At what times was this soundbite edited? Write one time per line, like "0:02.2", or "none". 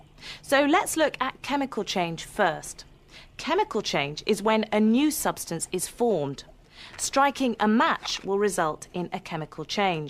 0:03.7